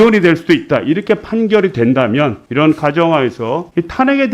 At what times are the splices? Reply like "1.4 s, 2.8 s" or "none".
none